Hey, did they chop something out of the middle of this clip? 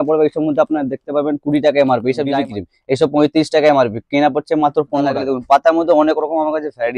yes; 2 cuts; at 2.3 s, 5.2 s

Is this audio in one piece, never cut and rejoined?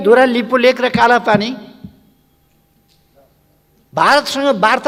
yes; 0 cuts

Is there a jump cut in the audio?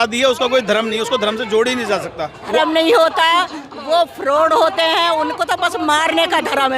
yes; 1 cut; at 2.6 s

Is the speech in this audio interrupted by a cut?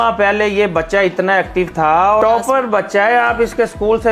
yes; 1 cut; at 2.2 s

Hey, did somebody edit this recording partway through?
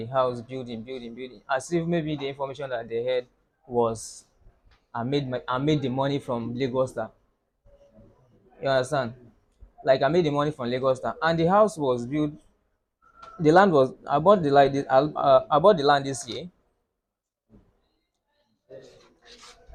no; 0 cuts

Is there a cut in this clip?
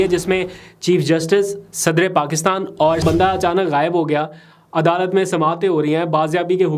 yes; 1 cut; at 3.0 s

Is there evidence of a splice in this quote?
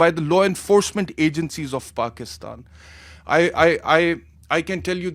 no; 0 cuts

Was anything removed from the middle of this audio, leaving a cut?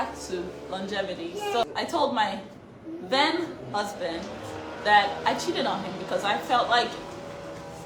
yes; 1 cut; at 1.6 s

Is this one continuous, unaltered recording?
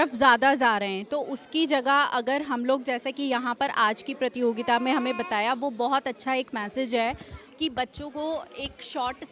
yes; 0 cuts

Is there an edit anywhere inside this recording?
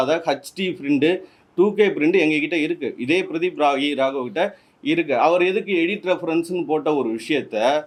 no; 0 cuts

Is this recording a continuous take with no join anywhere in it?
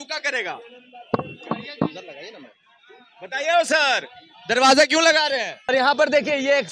no; 1 cut; at 5.7 s

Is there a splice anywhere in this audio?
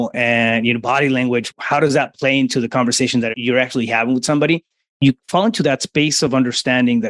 no; 0 cuts

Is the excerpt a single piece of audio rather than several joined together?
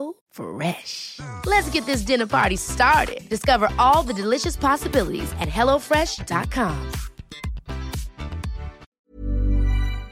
no; 1 cut; at 8.9 s

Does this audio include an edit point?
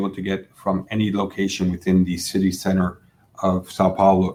no; 0 cuts

